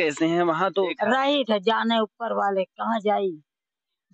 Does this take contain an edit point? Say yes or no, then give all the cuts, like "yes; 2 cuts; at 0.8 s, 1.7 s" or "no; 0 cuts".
yes; 1 cut; at 1.0 s